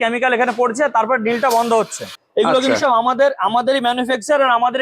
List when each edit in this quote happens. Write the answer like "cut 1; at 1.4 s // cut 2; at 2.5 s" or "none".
cut 1; at 2.2 s